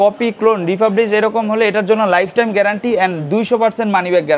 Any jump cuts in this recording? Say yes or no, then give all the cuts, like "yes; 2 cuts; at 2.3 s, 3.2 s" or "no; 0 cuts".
no; 0 cuts